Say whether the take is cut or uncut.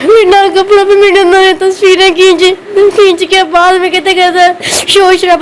uncut